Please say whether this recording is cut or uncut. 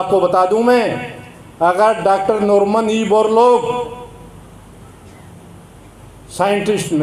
uncut